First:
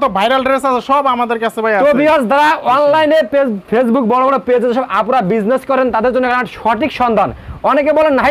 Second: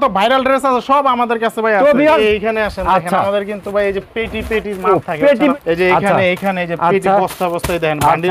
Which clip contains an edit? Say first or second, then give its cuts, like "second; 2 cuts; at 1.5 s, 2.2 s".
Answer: second; 2 cuts; at 2.2 s, 5.5 s